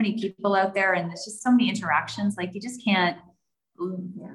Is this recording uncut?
yes; 0 cuts

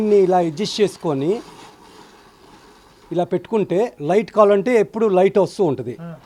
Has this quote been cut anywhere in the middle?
no; 0 cuts

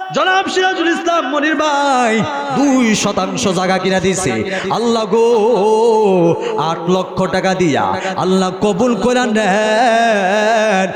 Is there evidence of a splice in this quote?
no; 0 cuts

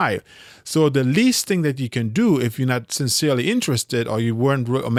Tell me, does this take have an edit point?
no; 0 cuts

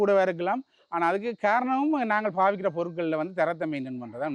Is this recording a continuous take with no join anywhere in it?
yes; 0 cuts

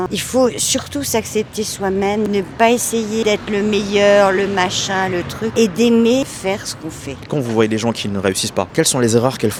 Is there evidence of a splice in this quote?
no; 0 cuts

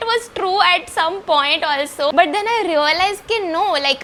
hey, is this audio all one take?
yes; 0 cuts

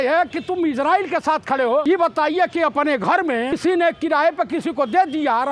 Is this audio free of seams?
no; 2 cuts; at 1.8 s, 3.6 s

